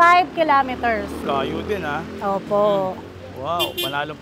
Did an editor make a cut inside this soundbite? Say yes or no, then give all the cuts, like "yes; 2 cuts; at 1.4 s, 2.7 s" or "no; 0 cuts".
no; 0 cuts